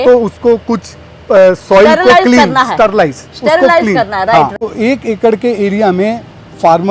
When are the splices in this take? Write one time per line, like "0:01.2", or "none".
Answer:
0:04.5